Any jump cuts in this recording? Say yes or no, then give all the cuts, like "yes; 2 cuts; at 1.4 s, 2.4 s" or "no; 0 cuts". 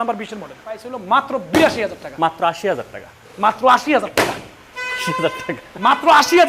yes; 1 cut; at 0.9 s